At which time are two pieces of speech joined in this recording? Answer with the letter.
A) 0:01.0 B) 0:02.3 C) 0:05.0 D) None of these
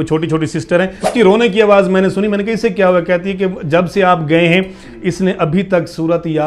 A